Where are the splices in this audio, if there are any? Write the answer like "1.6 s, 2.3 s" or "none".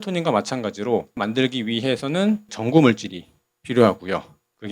1.2 s, 2.5 s